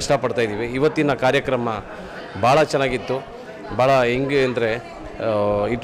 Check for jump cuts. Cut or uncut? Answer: uncut